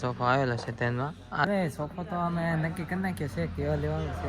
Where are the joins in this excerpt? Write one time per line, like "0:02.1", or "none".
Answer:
0:01.4